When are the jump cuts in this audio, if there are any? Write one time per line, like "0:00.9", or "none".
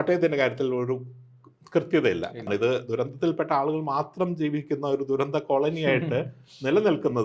0:02.5